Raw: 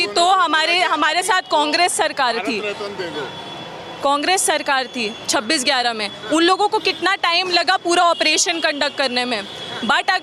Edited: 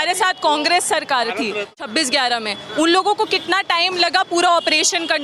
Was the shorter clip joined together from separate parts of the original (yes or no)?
yes